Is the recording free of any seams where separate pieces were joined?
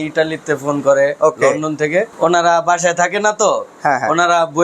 no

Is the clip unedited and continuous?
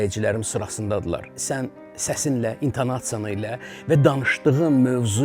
no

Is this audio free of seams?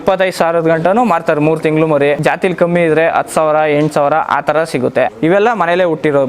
no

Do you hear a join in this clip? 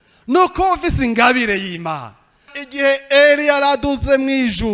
yes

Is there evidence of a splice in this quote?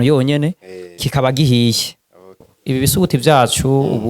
yes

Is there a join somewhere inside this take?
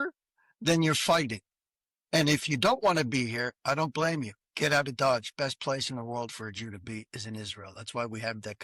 no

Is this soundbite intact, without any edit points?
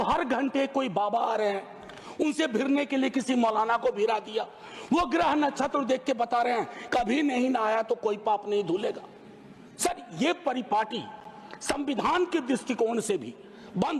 yes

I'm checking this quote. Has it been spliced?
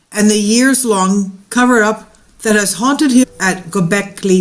no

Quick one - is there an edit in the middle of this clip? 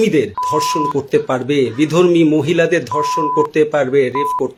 no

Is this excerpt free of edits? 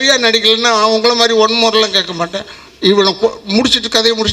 yes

